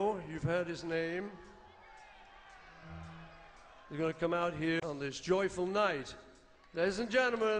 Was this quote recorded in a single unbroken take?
no; 1 cut; at 4.8 s

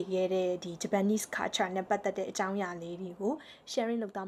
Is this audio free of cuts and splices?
yes; 0 cuts

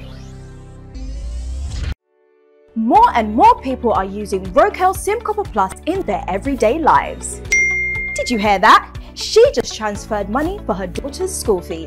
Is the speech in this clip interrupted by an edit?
yes; 1 cut; at 1.7 s

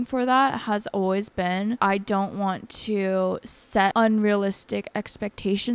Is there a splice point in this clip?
yes; 2 cuts; at 1.8 s, 3.9 s

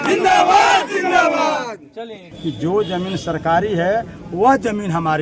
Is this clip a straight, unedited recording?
no; 1 cut; at 2.2 s

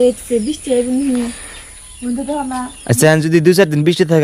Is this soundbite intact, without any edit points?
yes; 0 cuts

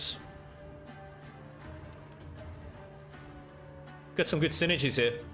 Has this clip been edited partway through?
no; 0 cuts

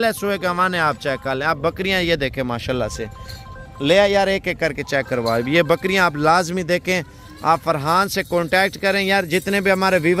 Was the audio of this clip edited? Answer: no; 0 cuts

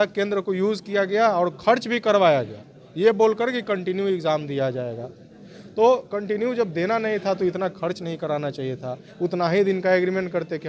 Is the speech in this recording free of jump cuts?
yes; 0 cuts

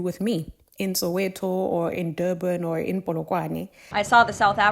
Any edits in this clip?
yes; 1 cut; at 3.8 s

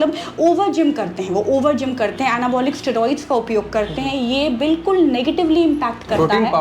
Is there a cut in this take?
no; 0 cuts

